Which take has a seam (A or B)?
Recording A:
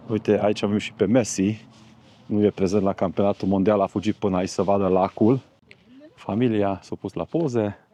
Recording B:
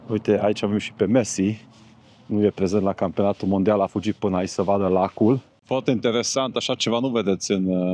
B